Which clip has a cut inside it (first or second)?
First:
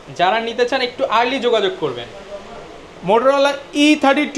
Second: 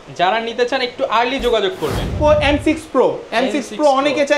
second